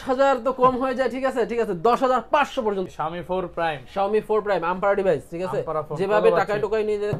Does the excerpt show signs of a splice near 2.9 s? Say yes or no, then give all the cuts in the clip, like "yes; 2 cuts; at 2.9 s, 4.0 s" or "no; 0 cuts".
yes; 1 cut; at 2.9 s